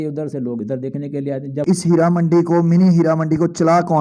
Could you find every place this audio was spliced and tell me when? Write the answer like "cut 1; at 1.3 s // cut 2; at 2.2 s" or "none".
cut 1; at 0.9 s